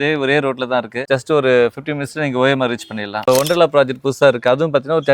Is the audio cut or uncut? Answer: cut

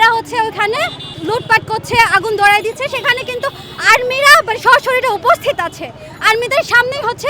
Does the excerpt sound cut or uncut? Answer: cut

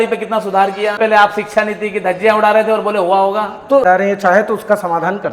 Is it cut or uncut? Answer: cut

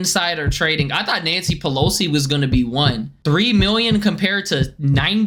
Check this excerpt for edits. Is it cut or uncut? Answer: uncut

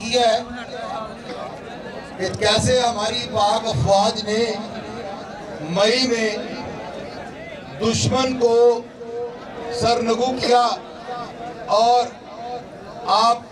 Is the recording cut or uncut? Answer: uncut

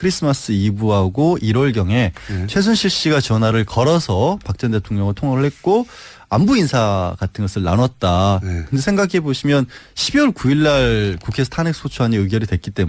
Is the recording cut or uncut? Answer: cut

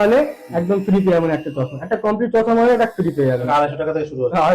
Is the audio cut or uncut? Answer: cut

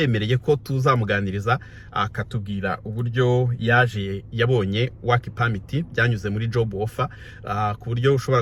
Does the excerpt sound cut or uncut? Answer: uncut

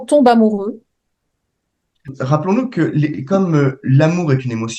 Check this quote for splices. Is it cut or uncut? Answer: cut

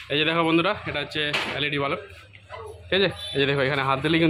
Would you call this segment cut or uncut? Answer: uncut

